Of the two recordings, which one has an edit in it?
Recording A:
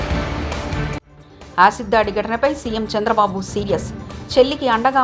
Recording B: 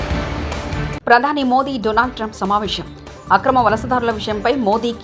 B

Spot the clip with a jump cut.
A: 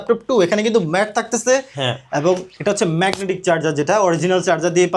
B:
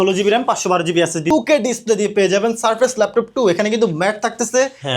B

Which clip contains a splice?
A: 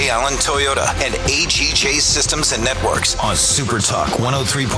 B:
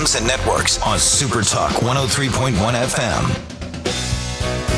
A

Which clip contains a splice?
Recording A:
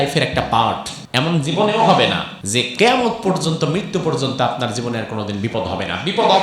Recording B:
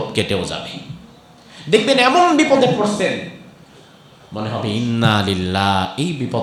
A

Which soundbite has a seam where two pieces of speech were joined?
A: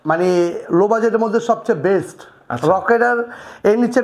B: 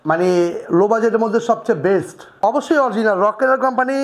B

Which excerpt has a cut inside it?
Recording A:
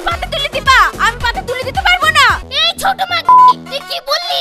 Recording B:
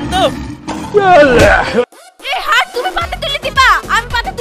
A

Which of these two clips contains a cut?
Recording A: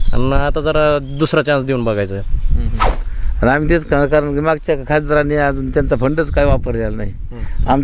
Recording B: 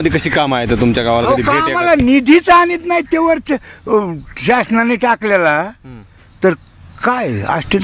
A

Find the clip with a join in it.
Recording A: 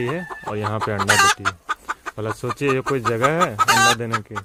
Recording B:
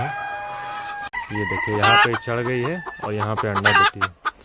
B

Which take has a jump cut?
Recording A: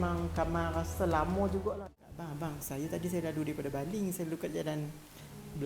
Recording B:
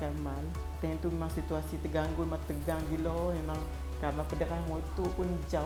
A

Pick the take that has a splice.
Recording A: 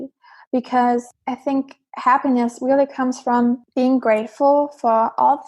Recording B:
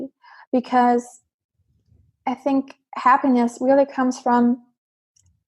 A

